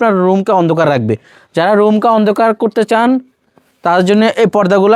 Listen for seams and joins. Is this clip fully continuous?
yes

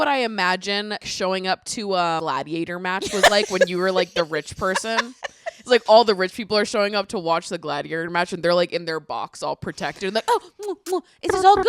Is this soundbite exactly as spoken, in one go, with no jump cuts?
no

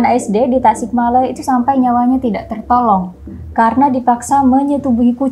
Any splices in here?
no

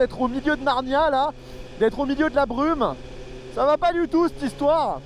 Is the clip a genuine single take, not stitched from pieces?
yes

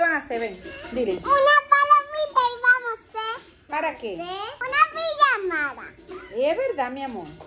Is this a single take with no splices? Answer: no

